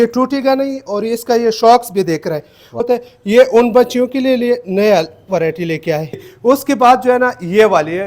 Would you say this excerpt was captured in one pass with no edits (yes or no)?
no